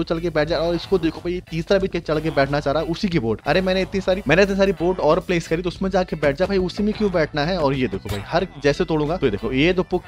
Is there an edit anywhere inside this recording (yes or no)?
no